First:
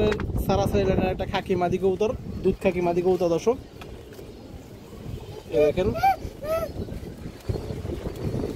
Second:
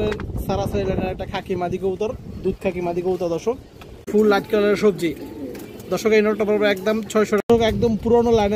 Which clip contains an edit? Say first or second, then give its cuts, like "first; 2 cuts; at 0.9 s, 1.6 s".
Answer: second; 2 cuts; at 4.1 s, 7.4 s